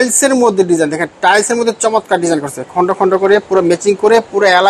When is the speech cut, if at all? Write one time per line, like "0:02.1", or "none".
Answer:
none